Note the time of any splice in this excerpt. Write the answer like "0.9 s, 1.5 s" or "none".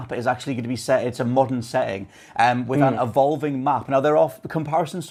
none